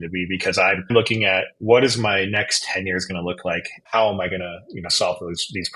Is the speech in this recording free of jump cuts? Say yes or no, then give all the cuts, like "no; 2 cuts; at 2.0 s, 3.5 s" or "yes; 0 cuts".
no; 2 cuts; at 0.9 s, 3.8 s